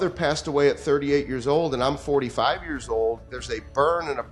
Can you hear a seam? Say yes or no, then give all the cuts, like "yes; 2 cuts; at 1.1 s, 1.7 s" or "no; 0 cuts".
no; 0 cuts